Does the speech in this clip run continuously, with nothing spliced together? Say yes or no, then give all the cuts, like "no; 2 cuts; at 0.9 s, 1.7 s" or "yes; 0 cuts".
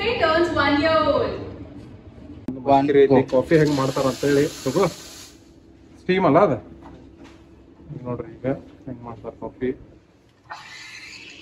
no; 1 cut; at 2.6 s